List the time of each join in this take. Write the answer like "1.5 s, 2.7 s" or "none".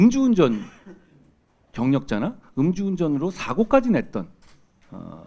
none